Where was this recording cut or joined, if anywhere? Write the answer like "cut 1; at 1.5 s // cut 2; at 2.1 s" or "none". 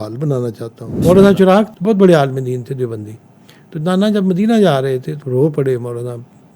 cut 1; at 1.0 s // cut 2; at 1.7 s // cut 3; at 5.2 s